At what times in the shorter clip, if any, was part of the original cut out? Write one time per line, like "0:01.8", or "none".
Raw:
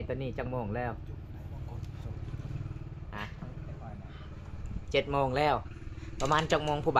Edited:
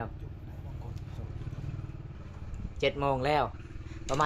0:02.2